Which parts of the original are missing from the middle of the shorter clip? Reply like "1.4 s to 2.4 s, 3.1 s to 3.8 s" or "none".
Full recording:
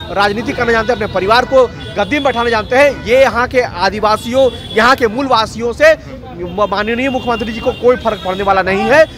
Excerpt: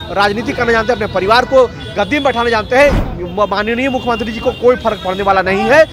3.0 s to 6.2 s